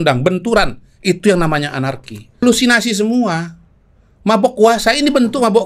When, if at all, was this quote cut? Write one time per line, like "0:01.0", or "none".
0:02.4